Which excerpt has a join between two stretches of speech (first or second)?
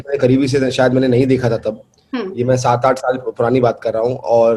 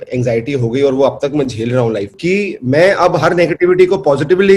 second